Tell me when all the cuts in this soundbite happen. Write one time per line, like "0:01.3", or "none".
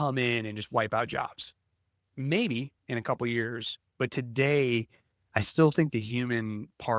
none